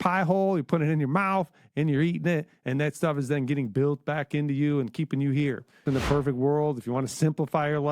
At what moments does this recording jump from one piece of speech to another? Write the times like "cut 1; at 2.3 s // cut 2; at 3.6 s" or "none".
cut 1; at 5.8 s